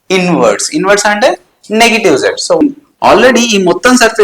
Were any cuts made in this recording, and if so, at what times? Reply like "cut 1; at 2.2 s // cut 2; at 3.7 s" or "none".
cut 1; at 2.6 s